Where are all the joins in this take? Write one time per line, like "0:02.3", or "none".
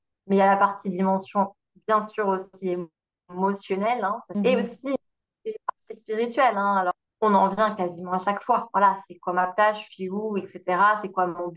0:04.2
0:06.9